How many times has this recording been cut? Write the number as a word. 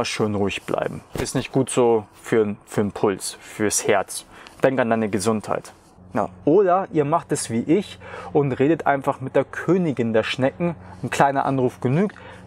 one